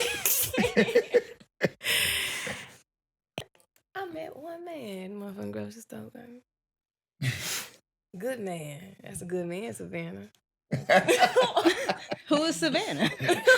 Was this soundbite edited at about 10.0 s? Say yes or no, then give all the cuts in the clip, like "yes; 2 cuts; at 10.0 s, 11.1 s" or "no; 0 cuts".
no; 1 cut; at 3.4 s